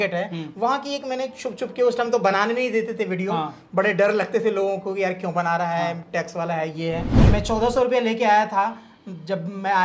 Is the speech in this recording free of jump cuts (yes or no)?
no